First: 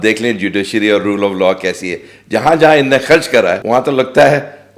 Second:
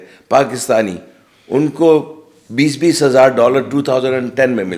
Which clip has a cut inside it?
first; 1 cut; at 3.6 s

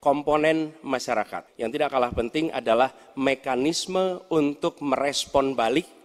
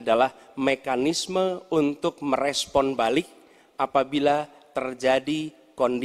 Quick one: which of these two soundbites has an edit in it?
first; 1 cut; at 1.4 s

